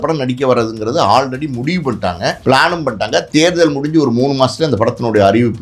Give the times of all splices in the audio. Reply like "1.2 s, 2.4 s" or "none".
2.4 s